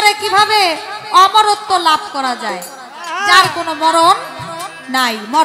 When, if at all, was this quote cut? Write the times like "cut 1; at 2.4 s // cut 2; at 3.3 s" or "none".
none